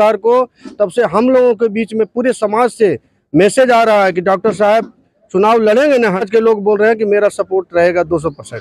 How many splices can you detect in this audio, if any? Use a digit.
1